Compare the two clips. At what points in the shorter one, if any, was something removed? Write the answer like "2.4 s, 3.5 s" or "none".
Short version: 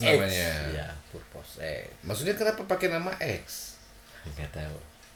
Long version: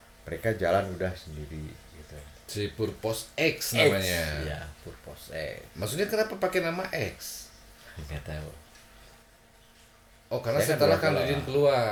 none